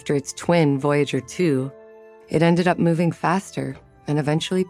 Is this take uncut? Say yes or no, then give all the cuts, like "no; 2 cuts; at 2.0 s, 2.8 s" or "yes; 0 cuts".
yes; 0 cuts